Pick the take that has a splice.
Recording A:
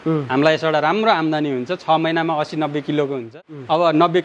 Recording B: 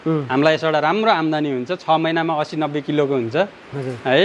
A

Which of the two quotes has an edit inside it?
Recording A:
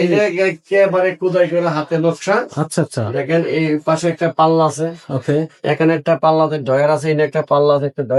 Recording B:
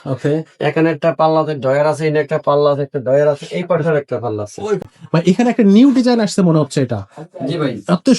B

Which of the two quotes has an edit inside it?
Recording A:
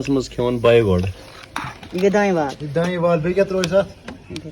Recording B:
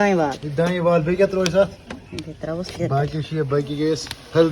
A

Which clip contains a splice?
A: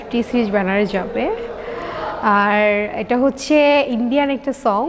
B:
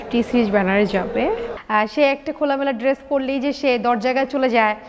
B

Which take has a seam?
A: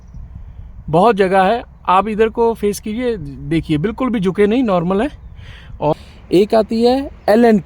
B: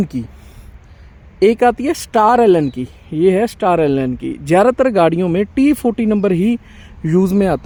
A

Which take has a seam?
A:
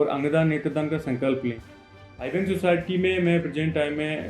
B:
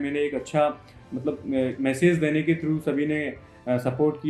A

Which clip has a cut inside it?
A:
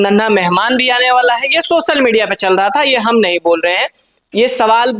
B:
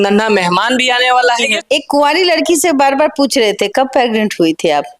B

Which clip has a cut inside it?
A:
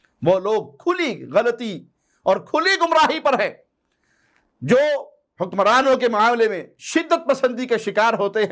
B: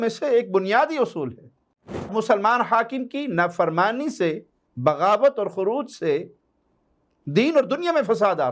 B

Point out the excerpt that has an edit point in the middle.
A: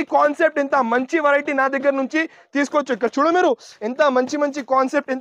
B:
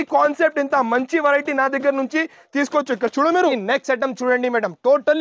B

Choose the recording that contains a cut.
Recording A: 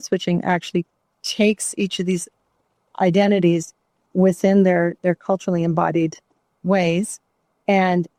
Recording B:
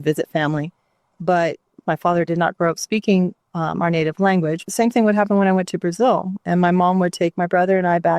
B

